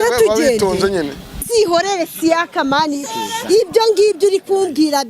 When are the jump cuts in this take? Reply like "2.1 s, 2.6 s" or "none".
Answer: 1.5 s